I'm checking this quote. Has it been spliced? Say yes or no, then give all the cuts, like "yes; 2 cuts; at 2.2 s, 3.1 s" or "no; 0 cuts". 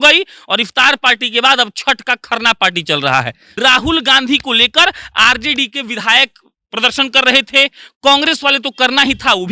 yes; 1 cut; at 3.4 s